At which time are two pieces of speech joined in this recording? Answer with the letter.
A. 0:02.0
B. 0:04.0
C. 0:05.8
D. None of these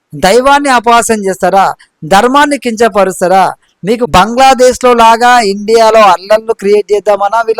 B